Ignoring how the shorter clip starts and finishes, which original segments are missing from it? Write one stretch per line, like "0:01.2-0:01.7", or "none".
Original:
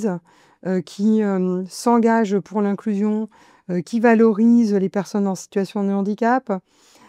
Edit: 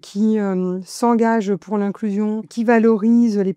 0:03.3-0:03.9